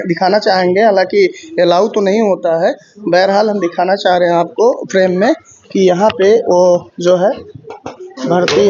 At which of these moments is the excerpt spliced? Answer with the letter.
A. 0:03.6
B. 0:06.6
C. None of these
C